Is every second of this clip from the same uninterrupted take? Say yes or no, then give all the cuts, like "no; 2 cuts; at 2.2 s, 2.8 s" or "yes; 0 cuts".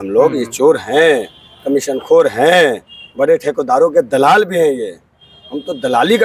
yes; 0 cuts